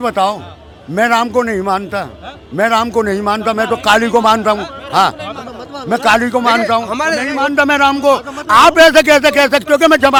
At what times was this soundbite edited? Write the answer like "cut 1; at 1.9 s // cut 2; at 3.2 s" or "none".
none